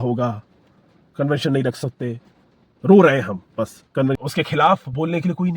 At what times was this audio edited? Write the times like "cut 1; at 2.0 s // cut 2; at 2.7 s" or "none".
cut 1; at 4.2 s